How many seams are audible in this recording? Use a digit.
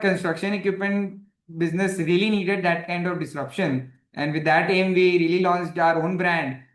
0